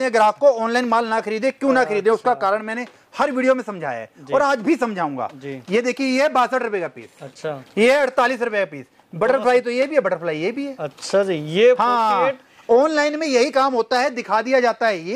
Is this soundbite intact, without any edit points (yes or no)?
yes